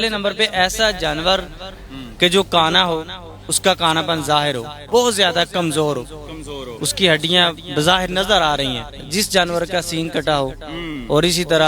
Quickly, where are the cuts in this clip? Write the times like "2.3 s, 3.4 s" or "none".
4.7 s, 9.0 s

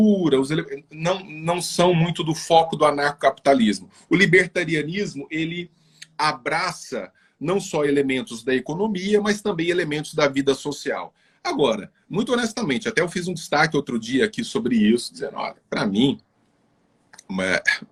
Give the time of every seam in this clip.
none

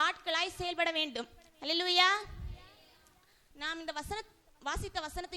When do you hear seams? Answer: 3.6 s

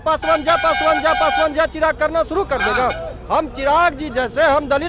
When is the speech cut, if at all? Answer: none

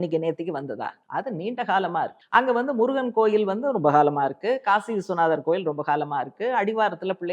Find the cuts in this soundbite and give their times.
1.0 s, 2.2 s

